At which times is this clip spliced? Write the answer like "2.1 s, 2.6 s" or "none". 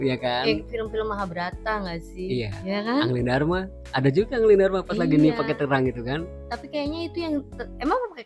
none